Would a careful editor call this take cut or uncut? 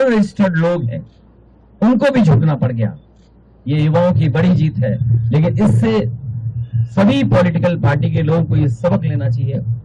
uncut